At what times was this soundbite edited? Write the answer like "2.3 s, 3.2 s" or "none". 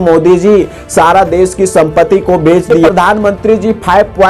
2.8 s